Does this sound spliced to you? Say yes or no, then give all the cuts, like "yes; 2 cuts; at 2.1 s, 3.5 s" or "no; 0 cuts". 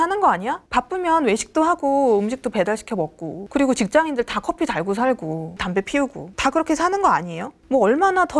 no; 0 cuts